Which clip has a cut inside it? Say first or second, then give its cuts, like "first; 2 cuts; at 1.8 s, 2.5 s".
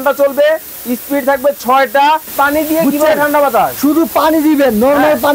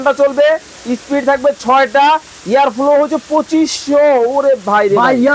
first; 1 cut; at 2.3 s